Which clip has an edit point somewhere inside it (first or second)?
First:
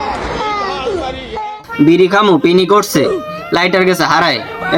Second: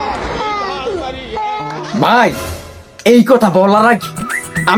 first